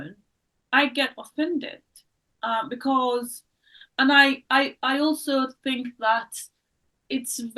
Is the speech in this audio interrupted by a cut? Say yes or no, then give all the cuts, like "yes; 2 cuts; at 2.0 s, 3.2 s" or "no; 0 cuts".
no; 0 cuts